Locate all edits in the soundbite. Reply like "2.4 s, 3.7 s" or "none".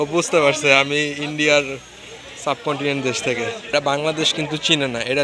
3.6 s